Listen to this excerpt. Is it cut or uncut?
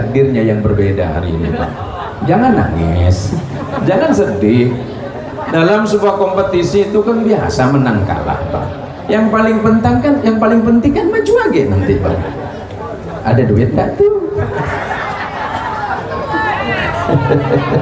uncut